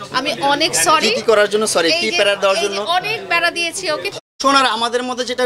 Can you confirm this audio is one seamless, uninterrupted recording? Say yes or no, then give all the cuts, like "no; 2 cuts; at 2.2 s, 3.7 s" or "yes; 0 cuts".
no; 1 cut; at 4.1 s